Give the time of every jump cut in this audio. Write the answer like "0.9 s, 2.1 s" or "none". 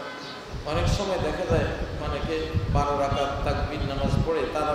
none